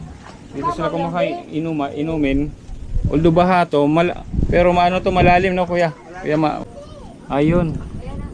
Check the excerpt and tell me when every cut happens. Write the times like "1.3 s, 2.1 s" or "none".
6.6 s